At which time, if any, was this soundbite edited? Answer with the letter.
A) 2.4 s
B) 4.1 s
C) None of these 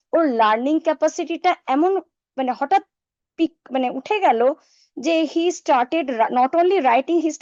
C